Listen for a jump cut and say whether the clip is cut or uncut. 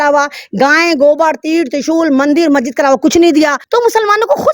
cut